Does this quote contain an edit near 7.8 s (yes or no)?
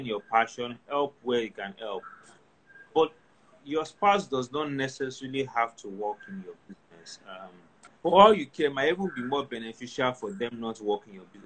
yes